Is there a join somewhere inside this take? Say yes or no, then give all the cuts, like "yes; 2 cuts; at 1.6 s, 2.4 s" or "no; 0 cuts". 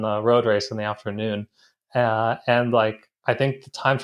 no; 0 cuts